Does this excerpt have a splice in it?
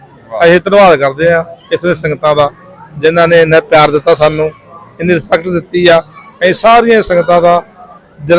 no; 0 cuts

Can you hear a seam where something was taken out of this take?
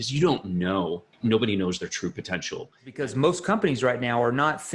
yes; 2 cuts; at 1.1 s, 2.9 s

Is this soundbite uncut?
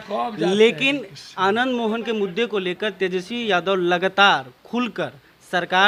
yes; 0 cuts

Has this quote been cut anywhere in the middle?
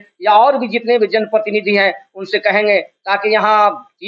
no; 0 cuts

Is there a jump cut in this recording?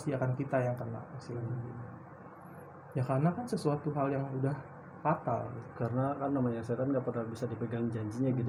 no; 0 cuts

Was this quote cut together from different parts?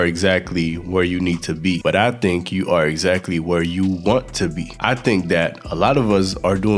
yes; 2 cuts; at 1.8 s, 4.7 s

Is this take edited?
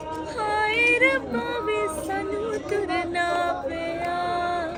no; 0 cuts

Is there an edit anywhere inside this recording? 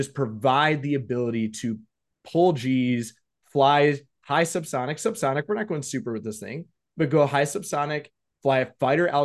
no; 0 cuts

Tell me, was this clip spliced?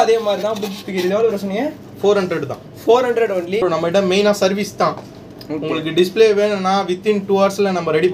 no; 0 cuts

